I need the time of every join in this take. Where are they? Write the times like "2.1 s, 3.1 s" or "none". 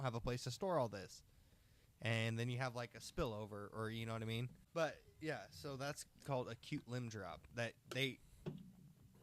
4.6 s

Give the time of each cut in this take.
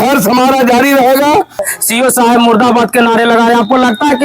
1.7 s

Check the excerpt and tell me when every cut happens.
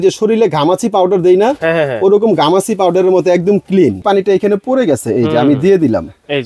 4.0 s

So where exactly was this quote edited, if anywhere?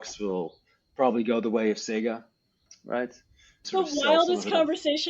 3.6 s

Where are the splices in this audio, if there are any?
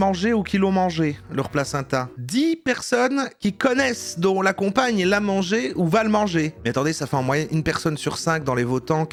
none

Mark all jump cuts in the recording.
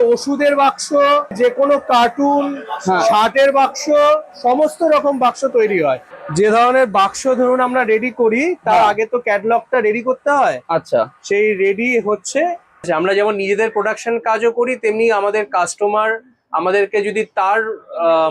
1.3 s, 6.1 s, 12.9 s

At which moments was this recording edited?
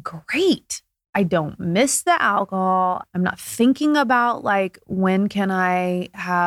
0.9 s

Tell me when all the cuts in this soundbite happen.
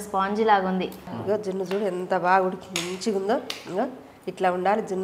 1.2 s

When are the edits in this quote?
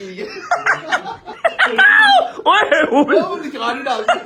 1.3 s

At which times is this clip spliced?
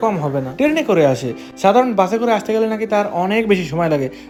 none

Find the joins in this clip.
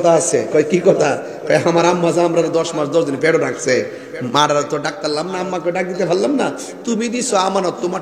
none

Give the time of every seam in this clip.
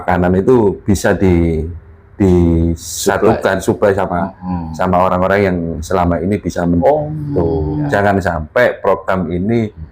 7.9 s

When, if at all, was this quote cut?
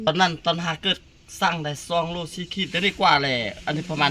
none

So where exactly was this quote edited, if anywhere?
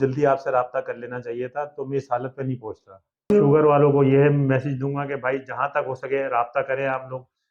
3.3 s

